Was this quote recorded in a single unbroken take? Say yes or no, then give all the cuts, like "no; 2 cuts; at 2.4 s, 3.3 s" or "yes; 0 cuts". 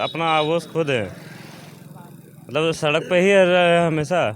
yes; 0 cuts